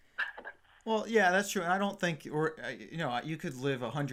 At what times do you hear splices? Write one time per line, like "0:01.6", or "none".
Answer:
none